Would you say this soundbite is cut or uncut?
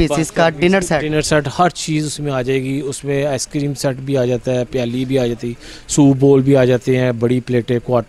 uncut